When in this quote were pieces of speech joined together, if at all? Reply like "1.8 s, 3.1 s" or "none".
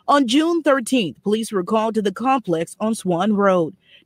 2.8 s